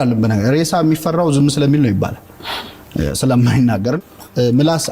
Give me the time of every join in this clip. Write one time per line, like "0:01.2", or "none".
0:04.0